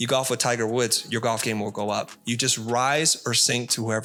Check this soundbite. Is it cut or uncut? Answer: uncut